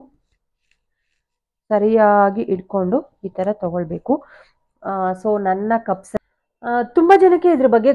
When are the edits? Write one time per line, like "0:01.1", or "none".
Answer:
0:06.1